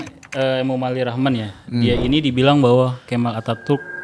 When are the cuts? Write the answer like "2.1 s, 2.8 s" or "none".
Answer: none

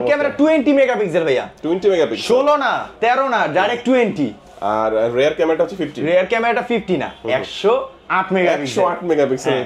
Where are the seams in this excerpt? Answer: none

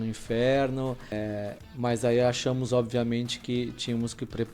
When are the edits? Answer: 1.1 s

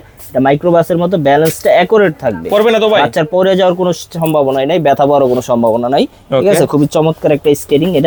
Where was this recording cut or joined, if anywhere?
none

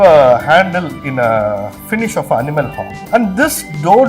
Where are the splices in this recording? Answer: 2.9 s

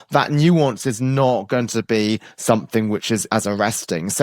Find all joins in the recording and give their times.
3.2 s

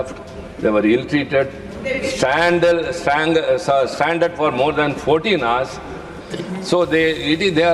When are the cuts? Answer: 6.2 s

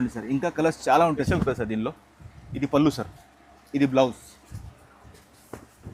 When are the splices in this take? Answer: 1.3 s

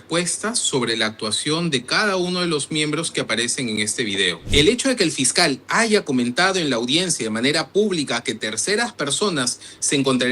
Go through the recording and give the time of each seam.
4.4 s

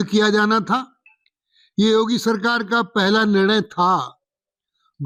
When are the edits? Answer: none

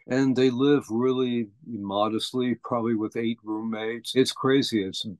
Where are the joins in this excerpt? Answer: 4.1 s

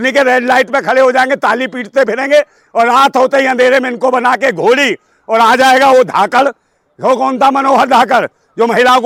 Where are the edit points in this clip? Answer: none

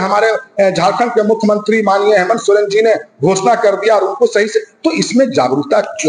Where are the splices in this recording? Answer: none

